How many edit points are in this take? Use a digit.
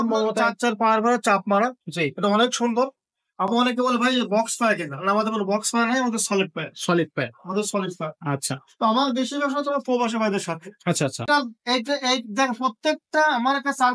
1